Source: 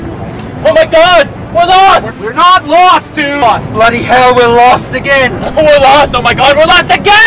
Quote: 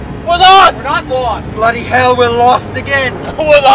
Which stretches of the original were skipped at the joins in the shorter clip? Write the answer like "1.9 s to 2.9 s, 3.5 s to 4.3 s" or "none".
2.2 s to 3.1 s